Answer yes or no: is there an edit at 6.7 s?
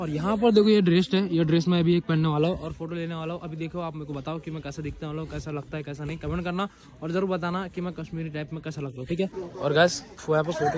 no